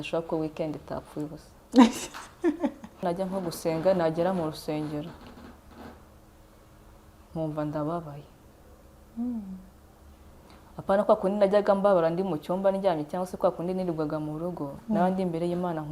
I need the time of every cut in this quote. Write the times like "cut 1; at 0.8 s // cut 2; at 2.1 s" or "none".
cut 1; at 3.0 s